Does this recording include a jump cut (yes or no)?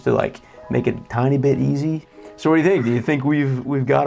yes